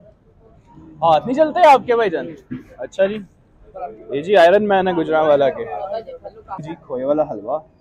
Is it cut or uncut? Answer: cut